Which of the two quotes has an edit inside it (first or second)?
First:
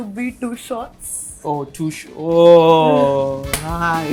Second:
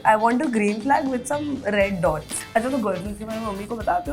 second